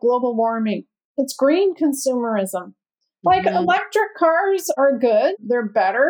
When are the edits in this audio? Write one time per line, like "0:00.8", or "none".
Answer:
0:00.9